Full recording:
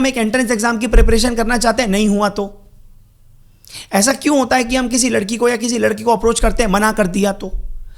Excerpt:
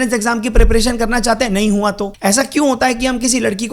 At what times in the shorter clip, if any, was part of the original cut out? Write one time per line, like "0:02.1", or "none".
0:02.1